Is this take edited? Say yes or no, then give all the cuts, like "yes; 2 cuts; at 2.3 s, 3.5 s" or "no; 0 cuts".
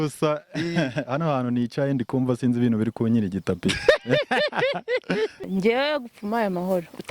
yes; 1 cut; at 5.4 s